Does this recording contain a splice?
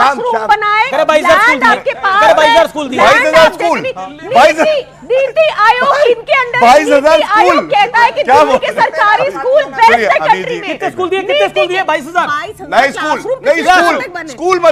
no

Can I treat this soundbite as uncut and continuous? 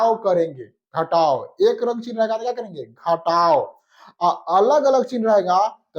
yes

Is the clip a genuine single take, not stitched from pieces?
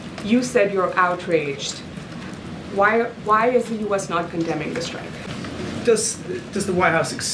no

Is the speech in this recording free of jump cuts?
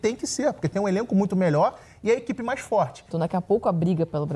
no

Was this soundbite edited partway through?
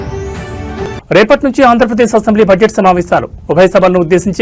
no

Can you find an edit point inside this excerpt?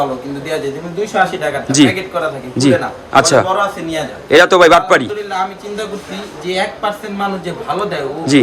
no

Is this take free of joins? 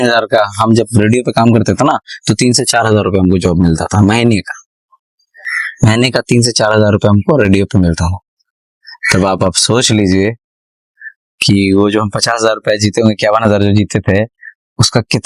yes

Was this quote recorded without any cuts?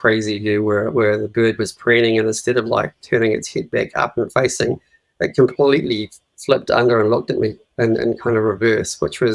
yes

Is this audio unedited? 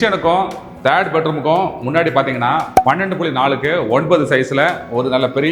yes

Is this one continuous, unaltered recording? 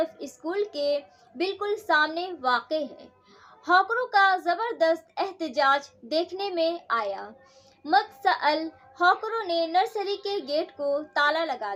yes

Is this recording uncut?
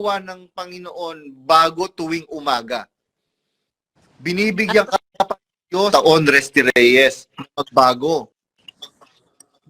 yes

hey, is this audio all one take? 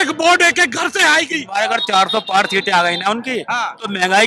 no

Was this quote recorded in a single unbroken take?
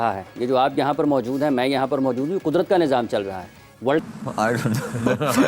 no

